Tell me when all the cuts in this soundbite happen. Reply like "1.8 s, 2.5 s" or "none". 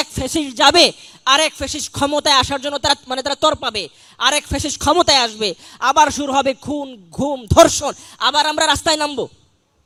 none